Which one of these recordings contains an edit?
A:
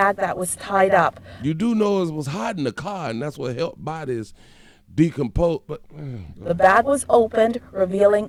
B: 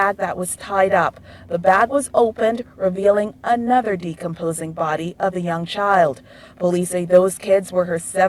B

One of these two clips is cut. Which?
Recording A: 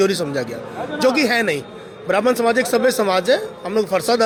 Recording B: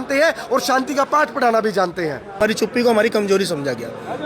B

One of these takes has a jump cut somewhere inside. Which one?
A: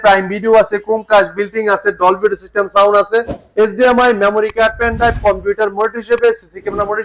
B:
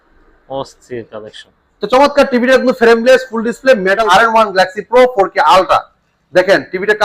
B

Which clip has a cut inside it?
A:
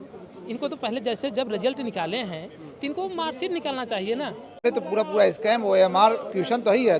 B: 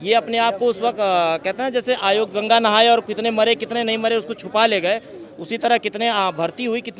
A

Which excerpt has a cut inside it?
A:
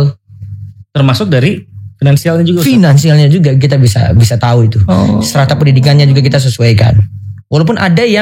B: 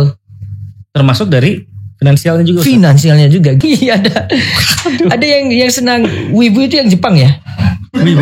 B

